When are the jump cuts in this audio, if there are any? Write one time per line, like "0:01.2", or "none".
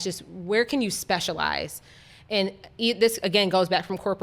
none